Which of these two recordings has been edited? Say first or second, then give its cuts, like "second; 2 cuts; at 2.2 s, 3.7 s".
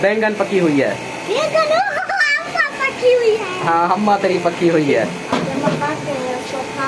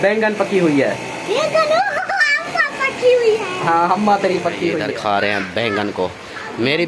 second; 1 cut; at 4.8 s